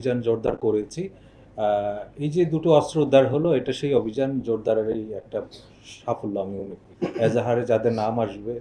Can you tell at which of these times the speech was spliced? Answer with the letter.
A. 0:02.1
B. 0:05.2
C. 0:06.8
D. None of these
C